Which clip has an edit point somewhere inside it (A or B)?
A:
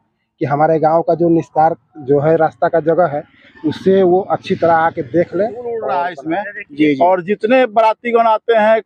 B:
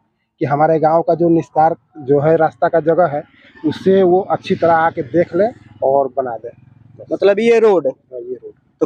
A